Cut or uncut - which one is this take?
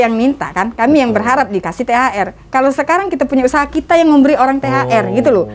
uncut